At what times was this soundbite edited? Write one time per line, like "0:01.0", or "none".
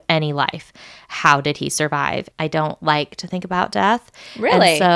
0:02.3